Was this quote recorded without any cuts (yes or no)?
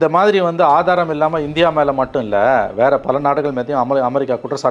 yes